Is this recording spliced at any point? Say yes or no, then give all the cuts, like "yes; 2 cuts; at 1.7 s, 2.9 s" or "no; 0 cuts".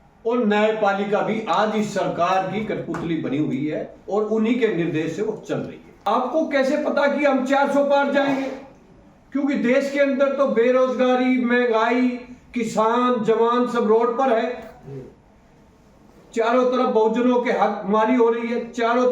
yes; 1 cut; at 6.0 s